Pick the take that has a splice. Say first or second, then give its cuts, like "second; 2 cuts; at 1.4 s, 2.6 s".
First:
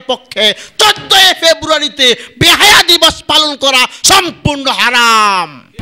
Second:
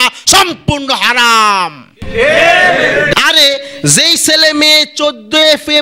second; 1 cut; at 3.1 s